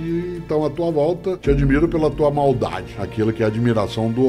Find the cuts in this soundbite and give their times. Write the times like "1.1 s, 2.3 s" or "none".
1.4 s